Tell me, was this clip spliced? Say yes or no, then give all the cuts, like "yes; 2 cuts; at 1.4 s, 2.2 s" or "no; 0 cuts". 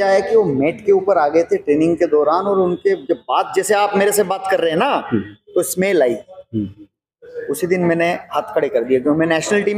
no; 0 cuts